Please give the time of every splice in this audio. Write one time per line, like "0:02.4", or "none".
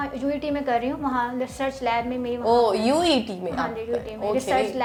none